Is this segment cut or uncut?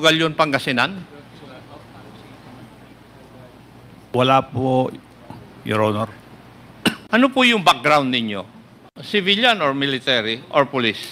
cut